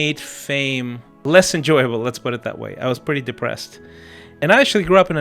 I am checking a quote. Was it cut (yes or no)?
yes